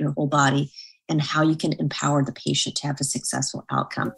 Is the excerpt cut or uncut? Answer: uncut